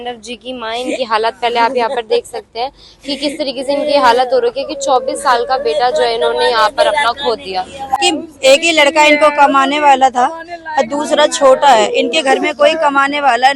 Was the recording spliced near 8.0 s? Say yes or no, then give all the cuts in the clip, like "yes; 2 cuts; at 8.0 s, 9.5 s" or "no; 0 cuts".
yes; 1 cut; at 8.0 s